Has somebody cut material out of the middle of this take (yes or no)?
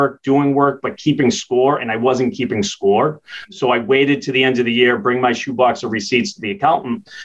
no